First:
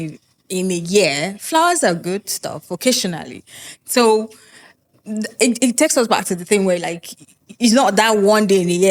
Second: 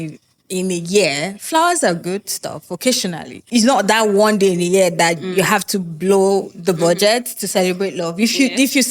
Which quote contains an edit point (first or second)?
second